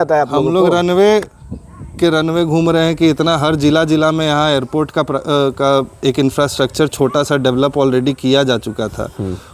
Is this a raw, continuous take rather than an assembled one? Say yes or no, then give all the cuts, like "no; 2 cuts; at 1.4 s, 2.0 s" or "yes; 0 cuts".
yes; 0 cuts